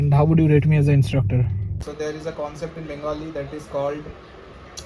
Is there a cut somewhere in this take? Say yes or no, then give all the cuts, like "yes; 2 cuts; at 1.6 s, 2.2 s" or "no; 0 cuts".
yes; 1 cut; at 1.7 s